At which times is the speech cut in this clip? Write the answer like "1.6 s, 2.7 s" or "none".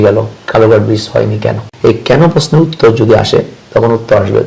1.7 s